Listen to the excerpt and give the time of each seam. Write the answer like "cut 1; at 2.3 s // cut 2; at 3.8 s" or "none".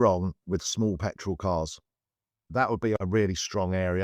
none